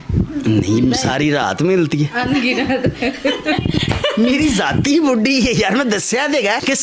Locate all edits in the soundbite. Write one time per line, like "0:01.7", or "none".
none